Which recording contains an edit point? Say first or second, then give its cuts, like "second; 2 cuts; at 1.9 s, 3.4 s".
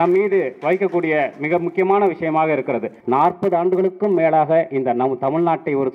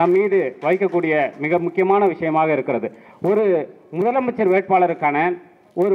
first; 1 cut; at 2.9 s